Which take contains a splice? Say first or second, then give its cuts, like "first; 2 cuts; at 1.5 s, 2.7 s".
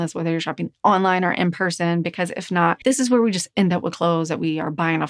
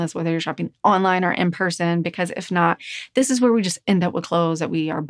first; 1 cut; at 2.8 s